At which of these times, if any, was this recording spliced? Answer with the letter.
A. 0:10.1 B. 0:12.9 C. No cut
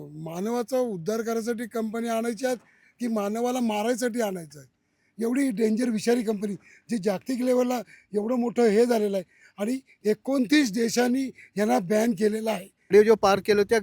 B